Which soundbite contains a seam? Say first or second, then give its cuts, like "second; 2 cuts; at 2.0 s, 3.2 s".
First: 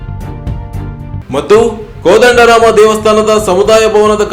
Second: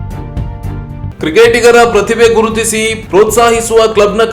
second; 1 cut; at 1.1 s